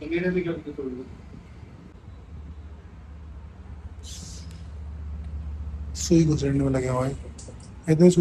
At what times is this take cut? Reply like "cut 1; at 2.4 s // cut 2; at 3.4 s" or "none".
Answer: cut 1; at 1.9 s